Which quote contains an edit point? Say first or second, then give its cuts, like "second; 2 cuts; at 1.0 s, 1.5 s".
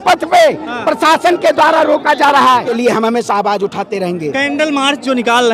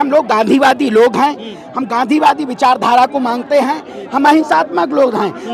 first; 1 cut; at 2.6 s